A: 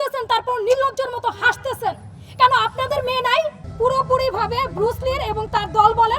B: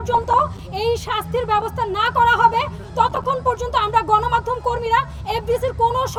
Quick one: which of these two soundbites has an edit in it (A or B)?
A